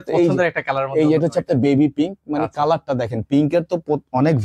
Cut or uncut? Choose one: uncut